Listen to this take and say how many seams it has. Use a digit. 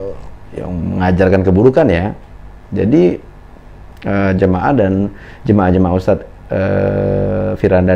0